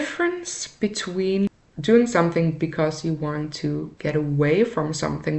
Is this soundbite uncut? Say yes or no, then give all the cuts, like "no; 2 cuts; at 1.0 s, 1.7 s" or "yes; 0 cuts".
no; 2 cuts; at 1.7 s, 3.9 s